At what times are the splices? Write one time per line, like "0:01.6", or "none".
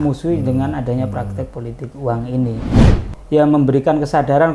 0:02.9